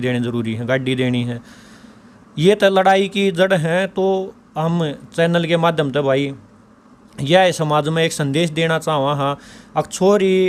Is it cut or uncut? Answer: uncut